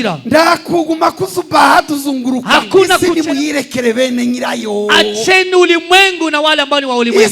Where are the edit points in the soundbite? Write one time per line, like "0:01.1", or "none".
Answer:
0:03.0